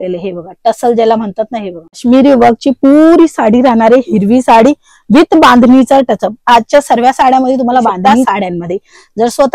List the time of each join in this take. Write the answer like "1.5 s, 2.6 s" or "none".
2.0 s, 8.1 s